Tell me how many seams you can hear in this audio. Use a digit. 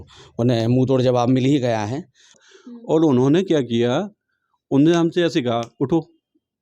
1